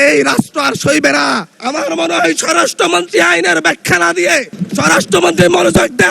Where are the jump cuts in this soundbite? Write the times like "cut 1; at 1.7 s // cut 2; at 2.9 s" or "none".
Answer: cut 1; at 1.5 s // cut 2; at 4.6 s

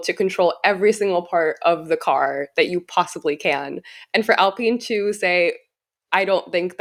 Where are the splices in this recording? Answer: none

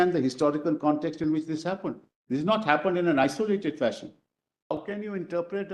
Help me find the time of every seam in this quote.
cut 1; at 4.7 s

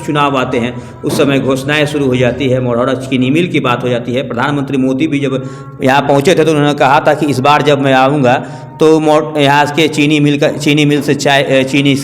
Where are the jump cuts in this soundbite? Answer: none

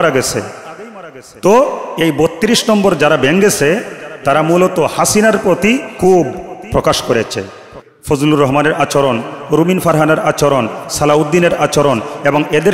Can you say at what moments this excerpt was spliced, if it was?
cut 1; at 7.8 s

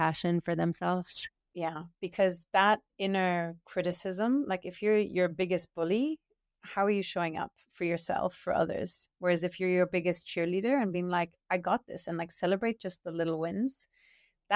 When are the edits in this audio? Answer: cut 1; at 1.5 s

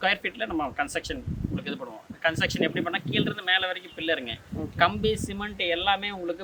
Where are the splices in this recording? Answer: none

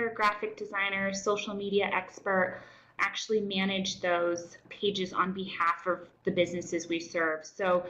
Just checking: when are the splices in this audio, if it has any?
cut 1; at 2.9 s // cut 2; at 4.7 s

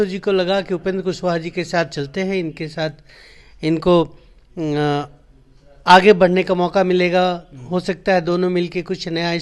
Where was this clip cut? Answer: none

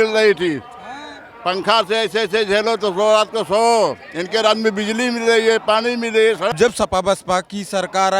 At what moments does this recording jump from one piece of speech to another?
cut 1; at 6.5 s

